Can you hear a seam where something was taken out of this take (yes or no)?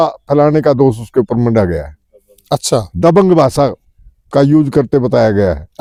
no